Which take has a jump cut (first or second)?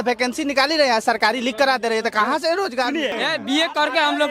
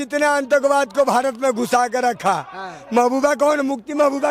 first